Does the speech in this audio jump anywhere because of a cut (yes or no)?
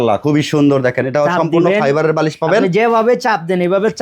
no